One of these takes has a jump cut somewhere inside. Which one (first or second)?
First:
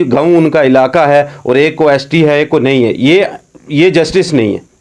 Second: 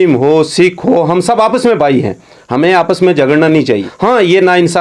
second